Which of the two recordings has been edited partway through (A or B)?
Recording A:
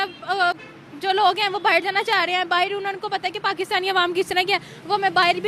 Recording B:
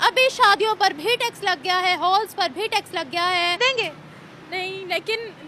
B